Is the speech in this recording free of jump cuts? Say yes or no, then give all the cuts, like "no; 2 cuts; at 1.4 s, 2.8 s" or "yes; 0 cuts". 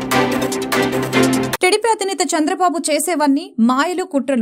no; 1 cut; at 1.5 s